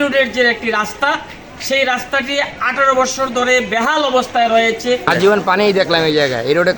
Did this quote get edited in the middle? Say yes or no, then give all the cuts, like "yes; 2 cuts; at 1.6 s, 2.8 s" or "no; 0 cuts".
yes; 1 cut; at 5.1 s